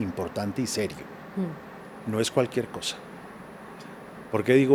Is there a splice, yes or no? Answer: no